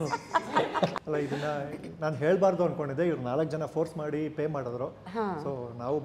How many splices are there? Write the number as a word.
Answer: one